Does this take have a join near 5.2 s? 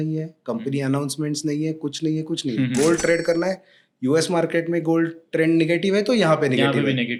no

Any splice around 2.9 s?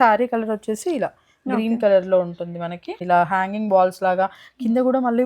yes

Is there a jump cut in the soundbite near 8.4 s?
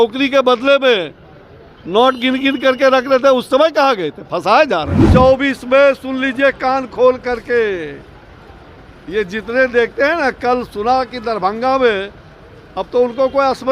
no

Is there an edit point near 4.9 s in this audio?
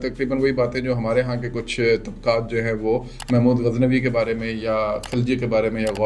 no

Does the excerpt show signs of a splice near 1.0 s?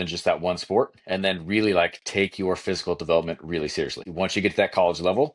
no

